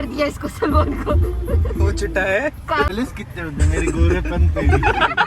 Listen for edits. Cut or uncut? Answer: cut